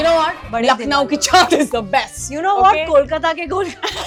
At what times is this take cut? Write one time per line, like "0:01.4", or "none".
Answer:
none